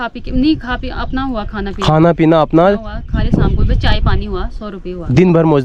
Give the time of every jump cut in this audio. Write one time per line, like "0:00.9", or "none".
none

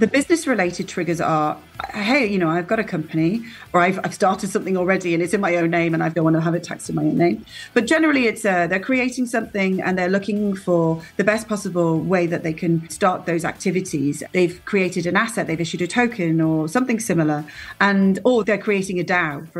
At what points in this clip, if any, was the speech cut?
0:03.7
0:06.1
0:12.9
0:14.2
0:18.4

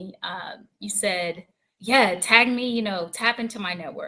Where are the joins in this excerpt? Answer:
0:01.7

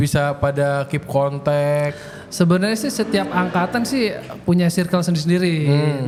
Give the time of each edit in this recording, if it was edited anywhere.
none

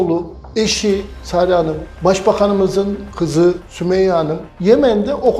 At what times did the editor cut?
0:01.2
0:01.9
0:04.1

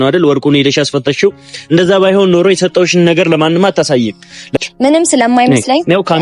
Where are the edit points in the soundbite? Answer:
0:04.6

